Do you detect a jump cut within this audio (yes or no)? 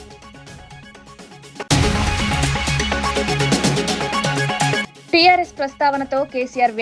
yes